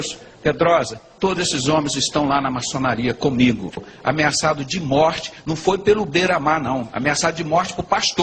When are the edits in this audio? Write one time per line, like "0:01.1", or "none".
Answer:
0:03.8